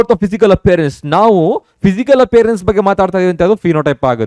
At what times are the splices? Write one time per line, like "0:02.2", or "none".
none